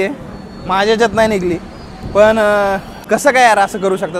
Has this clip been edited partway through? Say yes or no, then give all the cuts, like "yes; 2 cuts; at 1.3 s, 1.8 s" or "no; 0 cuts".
no; 0 cuts